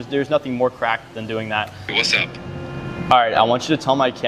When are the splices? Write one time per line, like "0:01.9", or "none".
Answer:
0:01.9